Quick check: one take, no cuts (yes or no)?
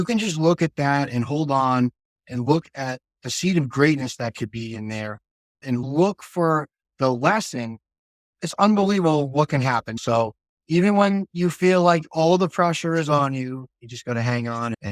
no